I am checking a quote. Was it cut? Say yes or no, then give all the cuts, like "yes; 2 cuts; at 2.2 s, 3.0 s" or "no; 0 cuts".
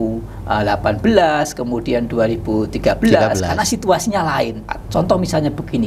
yes; 1 cut; at 4.7 s